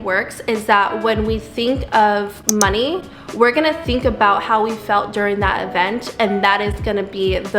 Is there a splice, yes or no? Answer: no